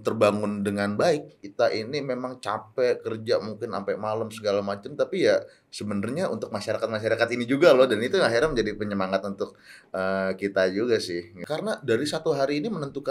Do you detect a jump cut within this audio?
yes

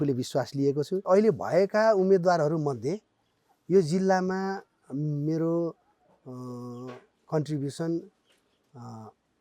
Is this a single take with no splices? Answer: no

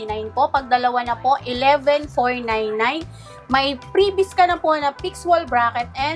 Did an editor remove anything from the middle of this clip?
no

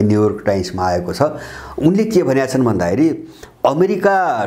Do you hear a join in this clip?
no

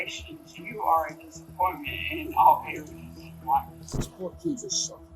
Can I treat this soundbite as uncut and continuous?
no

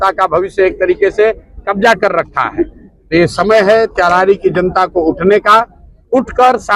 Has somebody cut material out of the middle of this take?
no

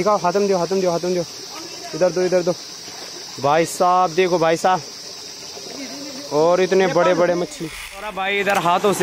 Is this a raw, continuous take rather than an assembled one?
no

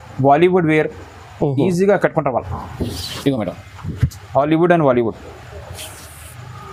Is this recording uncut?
yes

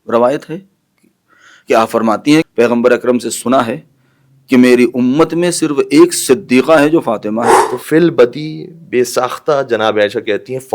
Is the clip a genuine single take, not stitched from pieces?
no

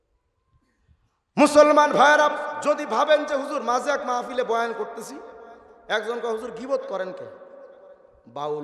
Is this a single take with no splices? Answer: yes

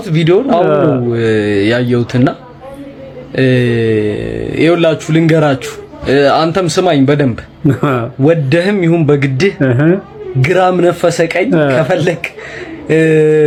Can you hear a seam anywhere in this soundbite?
no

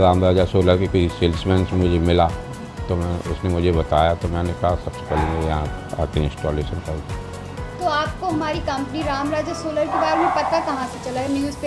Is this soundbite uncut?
yes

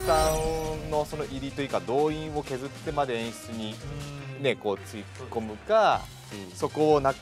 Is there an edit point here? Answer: no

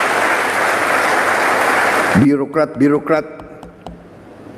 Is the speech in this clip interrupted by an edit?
yes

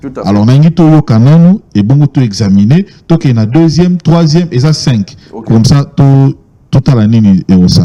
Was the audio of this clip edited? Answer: no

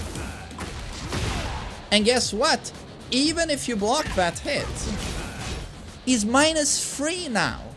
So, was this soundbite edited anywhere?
no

